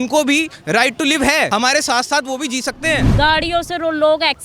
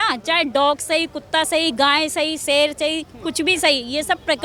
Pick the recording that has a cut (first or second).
first